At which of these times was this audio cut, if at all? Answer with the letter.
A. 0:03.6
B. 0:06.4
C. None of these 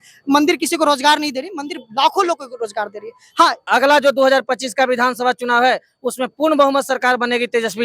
A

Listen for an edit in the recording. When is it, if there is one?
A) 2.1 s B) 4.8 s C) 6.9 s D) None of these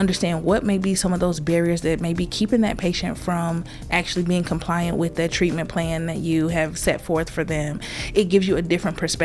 D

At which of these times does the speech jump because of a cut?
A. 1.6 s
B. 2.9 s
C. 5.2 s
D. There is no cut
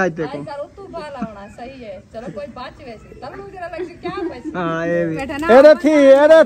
C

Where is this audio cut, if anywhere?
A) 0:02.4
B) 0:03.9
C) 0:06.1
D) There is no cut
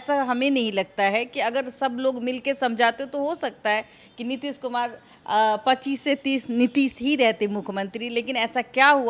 D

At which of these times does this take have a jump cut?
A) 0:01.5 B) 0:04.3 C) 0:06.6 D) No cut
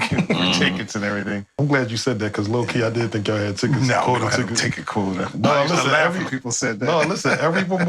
A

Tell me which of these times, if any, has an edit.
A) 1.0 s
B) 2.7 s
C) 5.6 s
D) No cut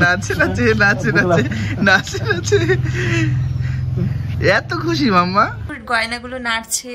C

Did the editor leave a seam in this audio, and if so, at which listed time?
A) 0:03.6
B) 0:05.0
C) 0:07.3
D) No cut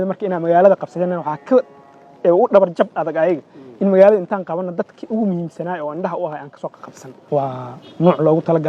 C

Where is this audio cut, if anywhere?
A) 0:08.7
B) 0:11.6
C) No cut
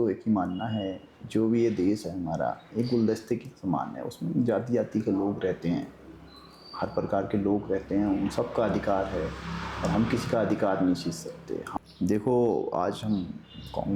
B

